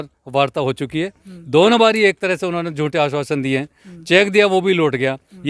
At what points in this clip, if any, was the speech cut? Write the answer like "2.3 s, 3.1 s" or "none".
none

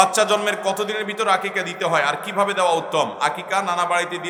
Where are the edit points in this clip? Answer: none

